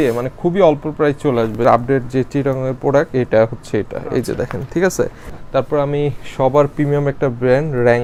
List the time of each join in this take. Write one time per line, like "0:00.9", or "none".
none